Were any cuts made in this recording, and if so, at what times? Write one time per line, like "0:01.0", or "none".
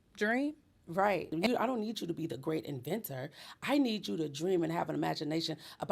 0:01.3

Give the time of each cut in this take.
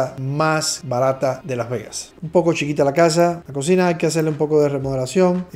0:02.2
0:03.5

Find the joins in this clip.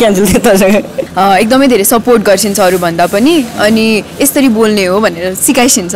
0:01.0

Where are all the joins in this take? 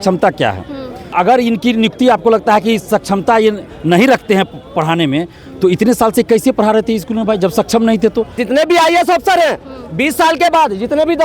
0:01.1
0:08.4

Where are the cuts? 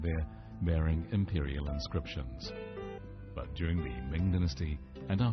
0:03.1

